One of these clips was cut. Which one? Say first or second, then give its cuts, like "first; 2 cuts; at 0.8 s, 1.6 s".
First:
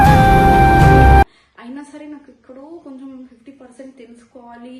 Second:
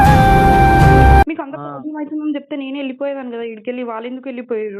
second; 1 cut; at 1.3 s